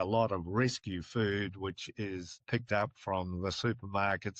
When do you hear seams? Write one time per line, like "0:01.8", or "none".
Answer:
0:02.4